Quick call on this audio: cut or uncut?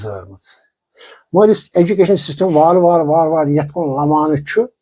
uncut